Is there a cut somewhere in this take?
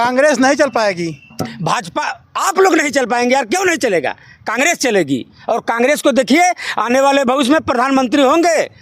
no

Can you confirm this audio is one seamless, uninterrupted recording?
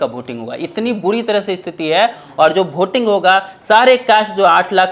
yes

